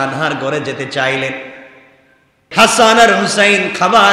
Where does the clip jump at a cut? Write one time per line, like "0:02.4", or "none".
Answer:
0:02.5